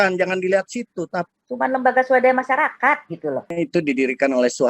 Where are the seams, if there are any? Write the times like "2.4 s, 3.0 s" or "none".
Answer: 1.3 s, 3.5 s